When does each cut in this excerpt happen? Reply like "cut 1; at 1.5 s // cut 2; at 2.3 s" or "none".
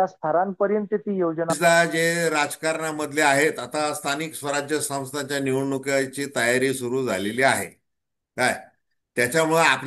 cut 1; at 1.6 s